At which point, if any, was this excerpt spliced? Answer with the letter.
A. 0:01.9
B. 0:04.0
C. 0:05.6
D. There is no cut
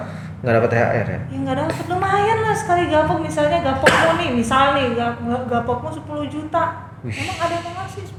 D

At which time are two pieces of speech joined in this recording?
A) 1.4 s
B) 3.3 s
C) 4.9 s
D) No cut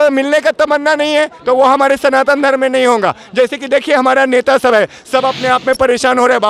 D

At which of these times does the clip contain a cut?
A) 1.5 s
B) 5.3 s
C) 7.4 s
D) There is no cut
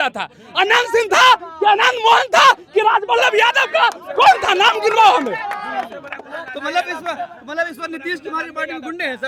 D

